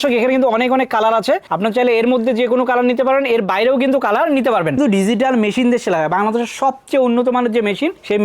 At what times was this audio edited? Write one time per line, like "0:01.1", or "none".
0:04.8